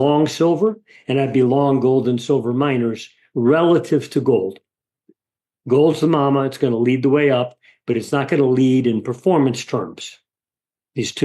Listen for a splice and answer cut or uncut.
uncut